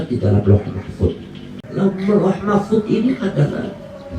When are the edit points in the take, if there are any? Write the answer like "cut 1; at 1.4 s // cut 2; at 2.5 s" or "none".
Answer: cut 1; at 1.6 s